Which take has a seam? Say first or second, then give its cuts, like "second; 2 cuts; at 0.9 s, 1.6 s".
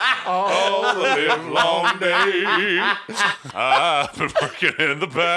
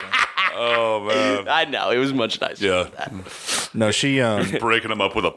first; 1 cut; at 3.4 s